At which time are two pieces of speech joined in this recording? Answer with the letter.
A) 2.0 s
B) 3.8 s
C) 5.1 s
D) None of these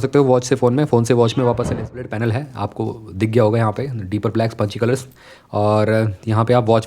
A